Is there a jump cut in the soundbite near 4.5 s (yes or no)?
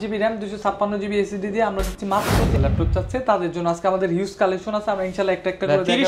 no